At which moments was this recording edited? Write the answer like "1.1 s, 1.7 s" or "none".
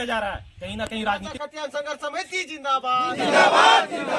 1.3 s